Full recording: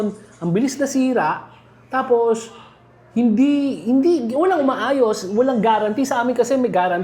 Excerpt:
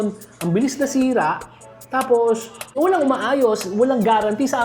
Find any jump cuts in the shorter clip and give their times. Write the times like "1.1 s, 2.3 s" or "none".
2.7 s